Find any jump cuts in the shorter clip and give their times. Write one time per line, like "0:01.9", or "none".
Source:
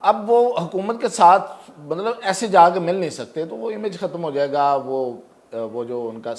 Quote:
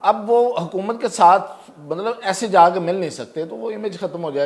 none